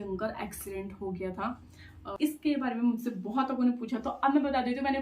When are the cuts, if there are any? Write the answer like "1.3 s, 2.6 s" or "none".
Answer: 2.0 s